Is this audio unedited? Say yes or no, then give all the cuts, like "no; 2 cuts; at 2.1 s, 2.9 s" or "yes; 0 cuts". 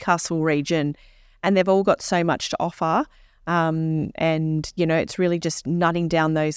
yes; 0 cuts